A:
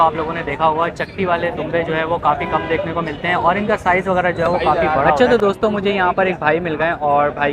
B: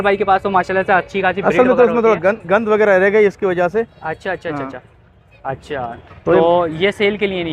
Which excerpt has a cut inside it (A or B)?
A